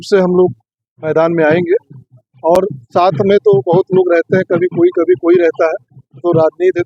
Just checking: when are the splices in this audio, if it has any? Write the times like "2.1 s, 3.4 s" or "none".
none